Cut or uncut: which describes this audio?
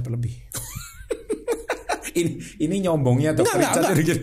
uncut